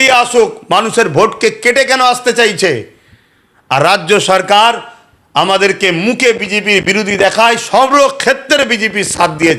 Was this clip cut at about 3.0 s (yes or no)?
no